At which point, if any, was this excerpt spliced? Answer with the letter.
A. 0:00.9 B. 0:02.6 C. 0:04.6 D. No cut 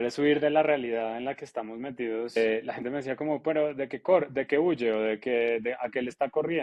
B